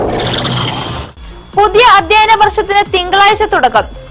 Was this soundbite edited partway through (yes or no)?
no